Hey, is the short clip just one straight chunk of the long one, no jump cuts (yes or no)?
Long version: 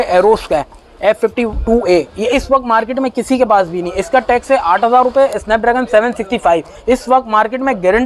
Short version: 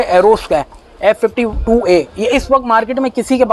yes